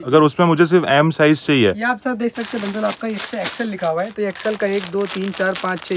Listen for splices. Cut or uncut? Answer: uncut